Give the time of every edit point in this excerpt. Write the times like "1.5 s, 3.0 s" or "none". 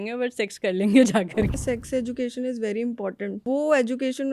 1.6 s, 3.4 s